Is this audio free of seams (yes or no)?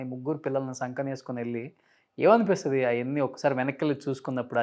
yes